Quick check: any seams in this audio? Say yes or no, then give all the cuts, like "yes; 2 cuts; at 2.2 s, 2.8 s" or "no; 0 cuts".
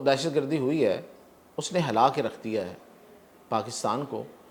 no; 0 cuts